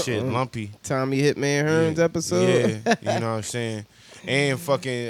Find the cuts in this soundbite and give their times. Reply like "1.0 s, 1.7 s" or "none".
none